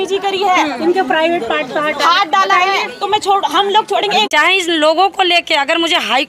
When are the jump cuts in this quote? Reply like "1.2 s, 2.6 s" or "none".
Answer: 4.3 s